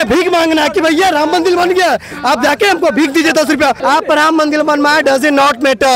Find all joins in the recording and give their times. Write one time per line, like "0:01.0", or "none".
0:03.8